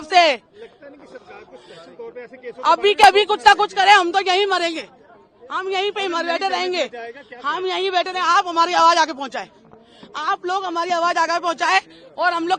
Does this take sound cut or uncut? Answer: uncut